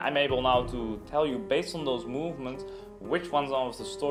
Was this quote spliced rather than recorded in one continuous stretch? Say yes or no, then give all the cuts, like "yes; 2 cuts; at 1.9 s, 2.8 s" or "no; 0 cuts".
no; 0 cuts